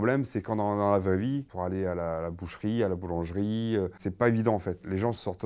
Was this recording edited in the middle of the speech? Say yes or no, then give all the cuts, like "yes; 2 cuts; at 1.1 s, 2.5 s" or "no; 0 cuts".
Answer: yes; 2 cuts; at 1.5 s, 4.0 s